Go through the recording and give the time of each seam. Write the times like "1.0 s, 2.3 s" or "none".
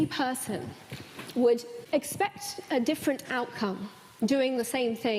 1.7 s

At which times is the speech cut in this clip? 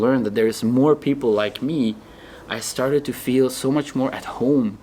none

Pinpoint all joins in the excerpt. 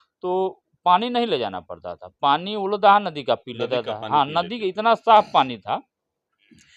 none

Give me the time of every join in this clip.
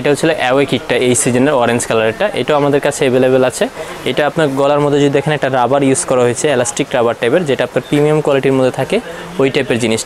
none

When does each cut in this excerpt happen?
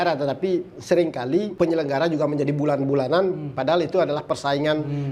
1.5 s

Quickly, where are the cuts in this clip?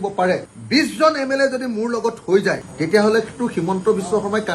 none

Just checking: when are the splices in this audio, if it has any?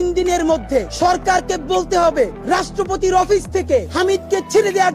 0.9 s, 2.4 s, 3.9 s

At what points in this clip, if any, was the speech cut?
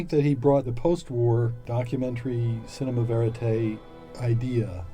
1.6 s

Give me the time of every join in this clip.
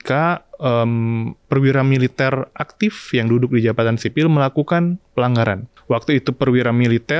1.3 s, 5.7 s

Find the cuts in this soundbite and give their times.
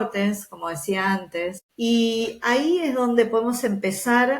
1.6 s

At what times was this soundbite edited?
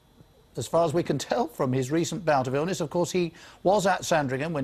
3.4 s

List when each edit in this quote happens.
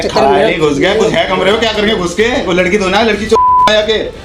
none

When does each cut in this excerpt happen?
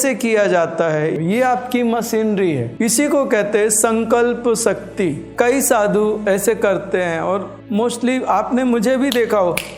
1.1 s, 7.5 s

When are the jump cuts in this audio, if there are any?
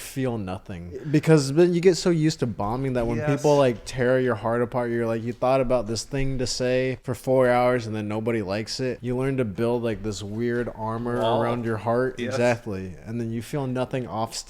1.0 s, 7.1 s, 9.0 s

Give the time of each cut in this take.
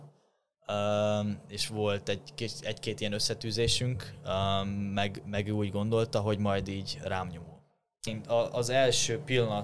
8.2 s

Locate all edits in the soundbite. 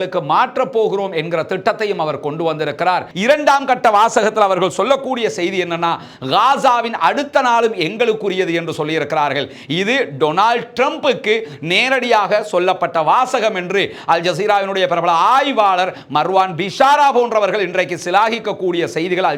3.1 s

